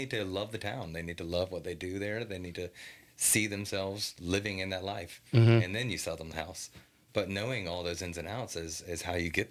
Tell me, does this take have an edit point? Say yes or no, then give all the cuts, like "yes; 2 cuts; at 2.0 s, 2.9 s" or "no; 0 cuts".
no; 0 cuts